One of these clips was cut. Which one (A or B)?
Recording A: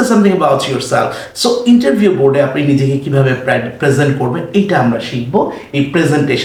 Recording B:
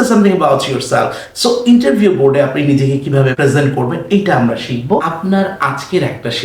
B